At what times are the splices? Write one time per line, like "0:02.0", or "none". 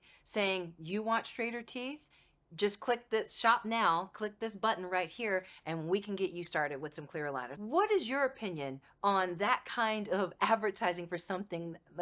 0:07.4